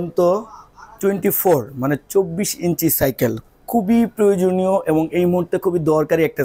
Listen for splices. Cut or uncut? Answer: uncut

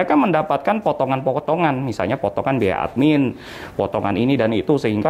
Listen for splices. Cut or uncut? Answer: uncut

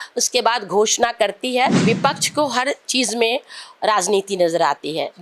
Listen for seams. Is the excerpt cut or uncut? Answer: cut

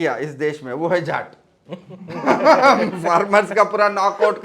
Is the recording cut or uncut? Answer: uncut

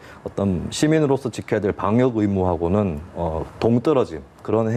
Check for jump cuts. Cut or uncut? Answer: uncut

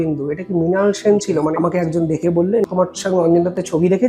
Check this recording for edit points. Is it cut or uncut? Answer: cut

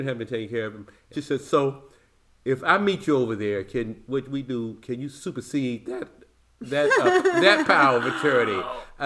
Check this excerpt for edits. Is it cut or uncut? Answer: cut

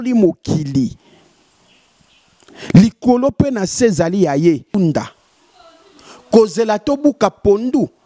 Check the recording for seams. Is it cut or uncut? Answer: cut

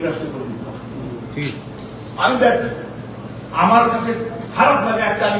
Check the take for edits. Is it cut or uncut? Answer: cut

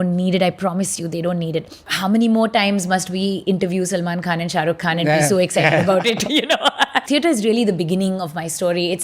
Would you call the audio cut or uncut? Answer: cut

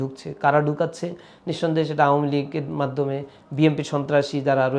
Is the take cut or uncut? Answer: uncut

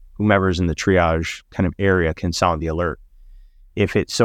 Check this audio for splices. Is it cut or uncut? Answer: uncut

